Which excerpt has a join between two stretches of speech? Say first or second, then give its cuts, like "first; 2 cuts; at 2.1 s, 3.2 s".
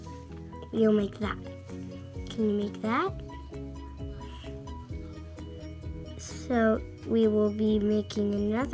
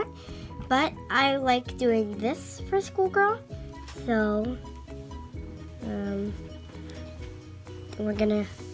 first; 3 cuts; at 3.2 s, 4.8 s, 6.4 s